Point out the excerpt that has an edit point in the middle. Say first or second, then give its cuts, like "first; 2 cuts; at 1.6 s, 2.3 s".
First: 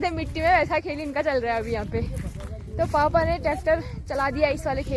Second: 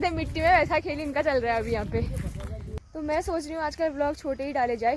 second; 1 cut; at 2.6 s